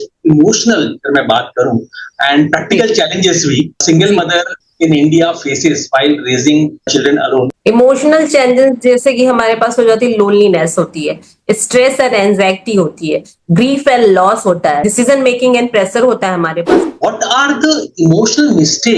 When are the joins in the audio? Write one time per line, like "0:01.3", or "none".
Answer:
0:07.5
0:16.8